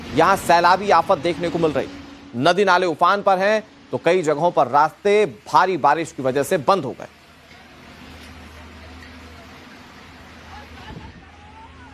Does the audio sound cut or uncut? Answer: cut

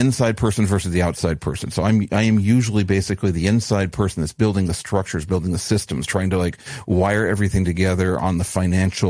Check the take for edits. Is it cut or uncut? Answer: uncut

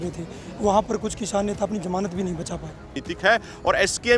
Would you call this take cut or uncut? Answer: cut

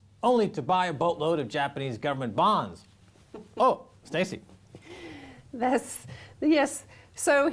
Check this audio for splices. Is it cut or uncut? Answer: cut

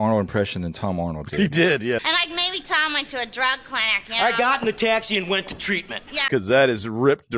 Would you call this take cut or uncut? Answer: cut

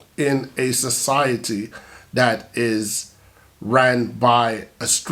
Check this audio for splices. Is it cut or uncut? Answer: uncut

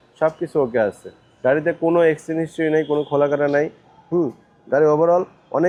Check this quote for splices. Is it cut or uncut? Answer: uncut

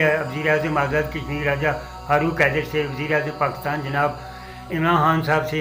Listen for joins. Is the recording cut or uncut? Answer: uncut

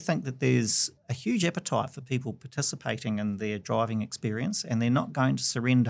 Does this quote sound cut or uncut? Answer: uncut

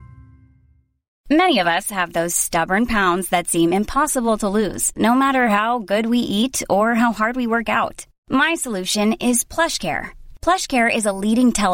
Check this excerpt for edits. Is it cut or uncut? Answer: cut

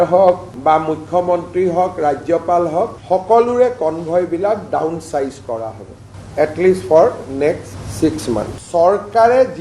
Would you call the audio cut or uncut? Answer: cut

